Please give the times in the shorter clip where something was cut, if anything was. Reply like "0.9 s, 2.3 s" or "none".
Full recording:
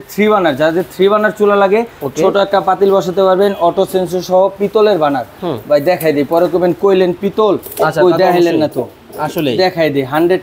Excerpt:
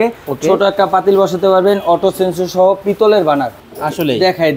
3.6 s